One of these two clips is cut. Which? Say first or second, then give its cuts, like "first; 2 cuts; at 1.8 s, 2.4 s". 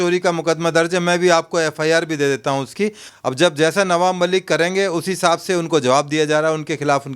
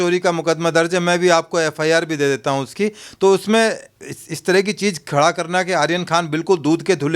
first; 1 cut; at 3.1 s